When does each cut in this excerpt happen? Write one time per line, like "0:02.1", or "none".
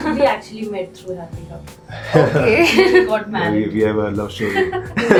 none